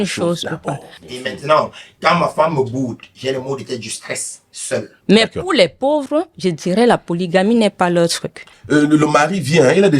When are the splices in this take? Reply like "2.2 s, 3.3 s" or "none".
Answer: 1.1 s, 5.0 s, 8.5 s